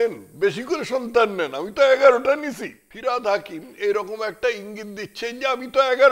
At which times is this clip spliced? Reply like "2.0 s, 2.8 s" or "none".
2.9 s